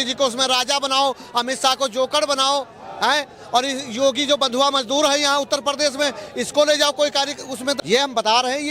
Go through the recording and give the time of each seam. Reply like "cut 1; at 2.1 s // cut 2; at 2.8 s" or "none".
cut 1; at 7.8 s